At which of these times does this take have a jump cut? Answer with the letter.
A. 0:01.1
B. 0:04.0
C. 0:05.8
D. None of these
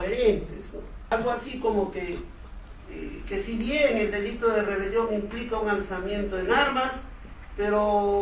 A